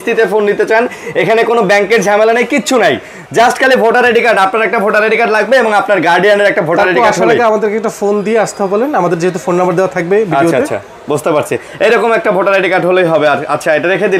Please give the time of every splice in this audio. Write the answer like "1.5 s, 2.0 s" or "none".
none